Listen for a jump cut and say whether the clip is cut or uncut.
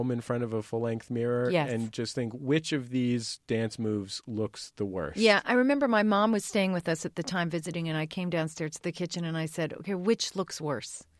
uncut